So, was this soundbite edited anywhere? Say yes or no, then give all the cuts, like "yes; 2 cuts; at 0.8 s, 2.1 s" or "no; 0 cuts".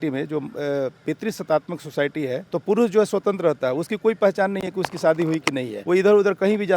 yes; 2 cuts; at 2.4 s, 5.7 s